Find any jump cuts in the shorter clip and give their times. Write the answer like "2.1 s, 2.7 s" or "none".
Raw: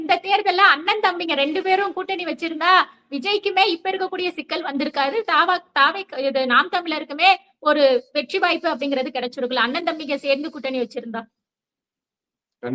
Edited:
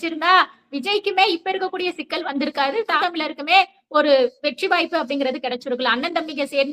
3.0 s